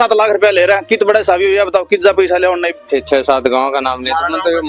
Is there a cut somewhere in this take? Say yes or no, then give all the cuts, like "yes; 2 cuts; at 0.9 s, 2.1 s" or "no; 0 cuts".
yes; 1 cut; at 2.8 s